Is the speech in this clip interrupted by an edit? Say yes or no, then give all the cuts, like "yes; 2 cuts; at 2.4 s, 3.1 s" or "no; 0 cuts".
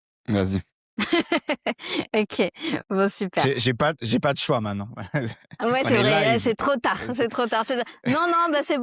no; 0 cuts